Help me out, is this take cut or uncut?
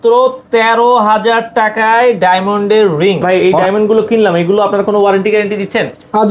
cut